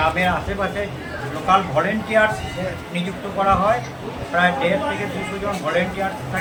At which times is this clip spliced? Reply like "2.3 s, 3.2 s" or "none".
none